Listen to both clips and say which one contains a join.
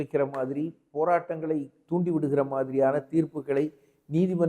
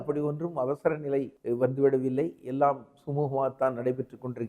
second; 1 cut; at 1.3 s

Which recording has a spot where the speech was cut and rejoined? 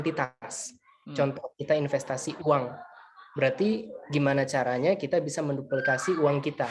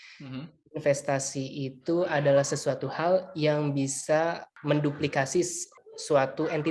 second; 2 cuts; at 4.5 s, 5.7 s

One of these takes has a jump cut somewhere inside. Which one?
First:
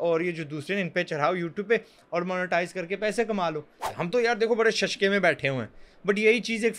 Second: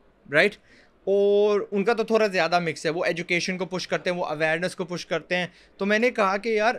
first; 1 cut; at 3.8 s

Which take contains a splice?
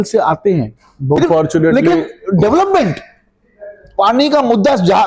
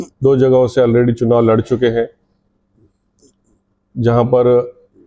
first; 1 cut; at 1.2 s

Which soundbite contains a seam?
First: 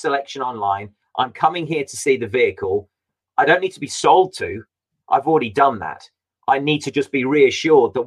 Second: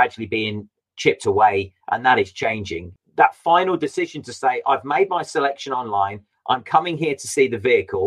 second; 1 cut; at 2.9 s

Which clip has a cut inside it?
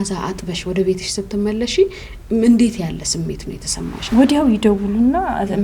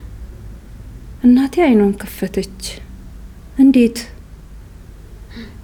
first; 1 cut; at 4.0 s

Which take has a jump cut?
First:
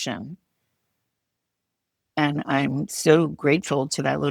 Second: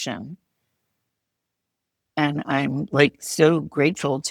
first; 1 cut; at 2.9 s

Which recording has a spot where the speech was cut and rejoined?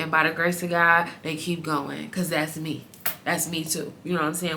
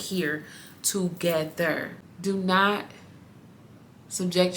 second; 1 cut; at 1.9 s

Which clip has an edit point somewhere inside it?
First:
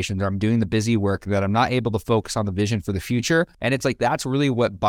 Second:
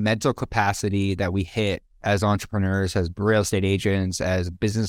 first; 1 cut; at 3.5 s

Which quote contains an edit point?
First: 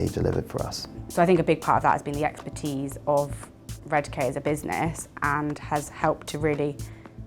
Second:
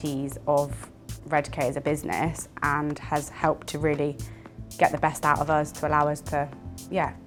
first; 1 cut; at 1.0 s

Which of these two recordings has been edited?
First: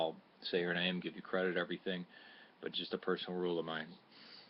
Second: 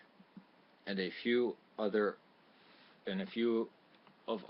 first; 1 cut; at 2.7 s

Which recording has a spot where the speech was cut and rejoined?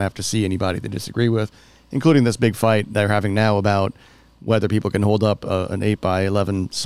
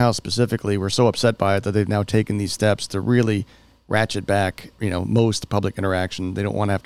second; 1 cut; at 4.7 s

